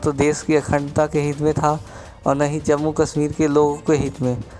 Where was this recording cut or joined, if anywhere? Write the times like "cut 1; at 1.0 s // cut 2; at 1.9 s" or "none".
none